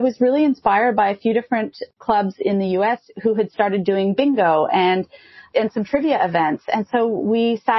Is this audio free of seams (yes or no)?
yes